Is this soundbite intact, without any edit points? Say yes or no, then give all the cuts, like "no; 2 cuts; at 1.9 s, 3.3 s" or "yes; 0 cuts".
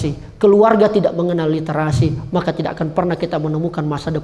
yes; 0 cuts